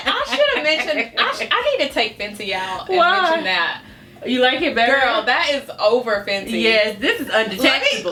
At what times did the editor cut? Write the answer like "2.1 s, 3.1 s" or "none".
none

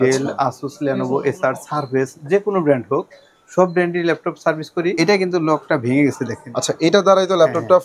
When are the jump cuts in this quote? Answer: 4.9 s

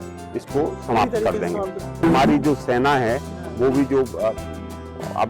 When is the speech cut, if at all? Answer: 2.0 s

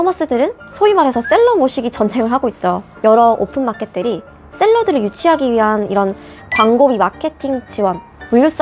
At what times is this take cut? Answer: 2.9 s

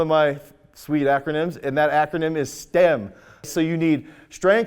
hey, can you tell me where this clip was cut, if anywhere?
3.5 s

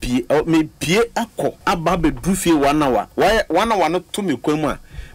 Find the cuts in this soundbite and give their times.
1.6 s

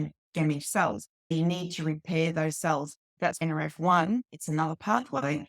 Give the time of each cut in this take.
1.3 s, 3.2 s

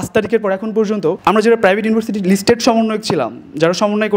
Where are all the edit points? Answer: 1.2 s

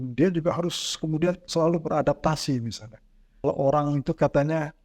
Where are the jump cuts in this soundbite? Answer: 3.4 s

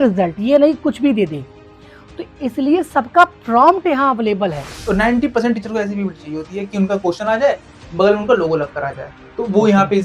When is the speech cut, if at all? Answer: 4.8 s

